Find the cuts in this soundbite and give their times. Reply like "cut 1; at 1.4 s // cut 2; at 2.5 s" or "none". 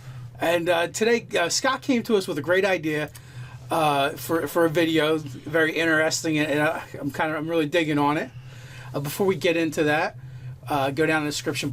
none